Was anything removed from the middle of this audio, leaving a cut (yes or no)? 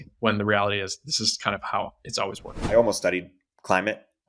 yes